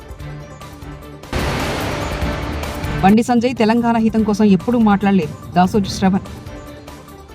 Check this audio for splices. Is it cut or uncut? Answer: cut